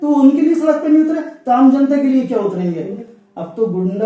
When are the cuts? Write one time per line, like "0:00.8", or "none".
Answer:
0:03.0

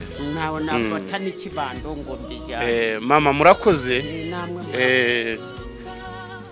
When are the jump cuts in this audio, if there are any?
0:05.4

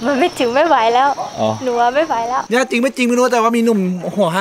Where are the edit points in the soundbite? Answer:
0:02.4

